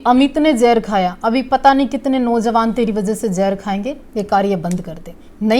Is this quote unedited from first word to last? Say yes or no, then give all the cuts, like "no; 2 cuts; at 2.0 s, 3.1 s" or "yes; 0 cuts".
yes; 0 cuts